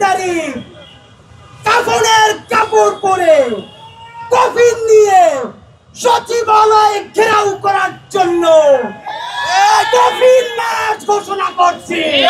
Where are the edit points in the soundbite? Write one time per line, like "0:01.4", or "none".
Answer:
none